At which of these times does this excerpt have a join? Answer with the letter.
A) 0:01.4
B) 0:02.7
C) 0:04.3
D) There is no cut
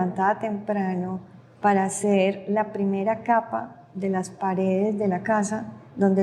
D